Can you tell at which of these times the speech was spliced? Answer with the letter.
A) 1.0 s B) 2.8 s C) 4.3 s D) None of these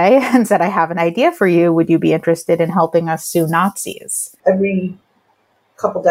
C